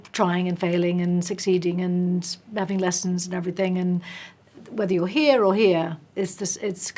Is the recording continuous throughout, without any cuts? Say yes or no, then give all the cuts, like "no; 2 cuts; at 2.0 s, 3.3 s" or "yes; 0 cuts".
yes; 0 cuts